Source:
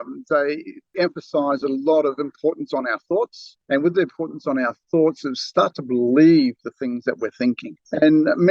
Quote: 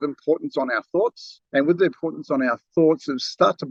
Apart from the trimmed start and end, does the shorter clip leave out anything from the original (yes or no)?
no